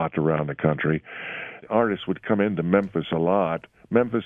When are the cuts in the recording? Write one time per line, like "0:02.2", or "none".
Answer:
0:01.6